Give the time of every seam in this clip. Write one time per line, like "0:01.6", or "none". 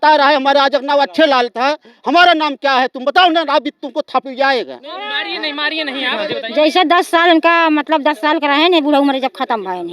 0:06.3